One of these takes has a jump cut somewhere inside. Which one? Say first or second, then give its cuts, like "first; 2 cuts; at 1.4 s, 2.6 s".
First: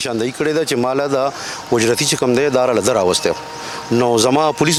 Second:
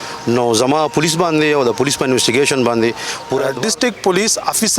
second; 1 cut; at 3.5 s